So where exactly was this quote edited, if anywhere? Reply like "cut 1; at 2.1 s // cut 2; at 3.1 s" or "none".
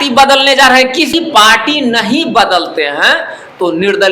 cut 1; at 1.1 s